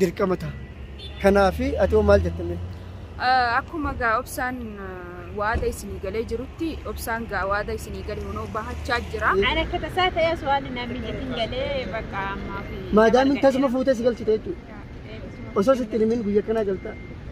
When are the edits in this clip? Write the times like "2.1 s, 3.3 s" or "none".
9.3 s

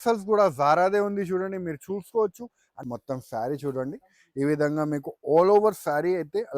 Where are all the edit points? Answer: 2.8 s

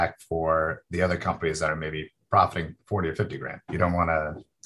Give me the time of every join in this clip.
3.6 s

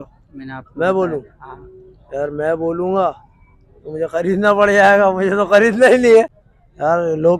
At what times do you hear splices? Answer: 6.4 s

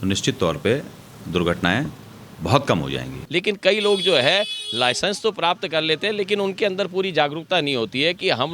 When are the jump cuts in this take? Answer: 3.2 s

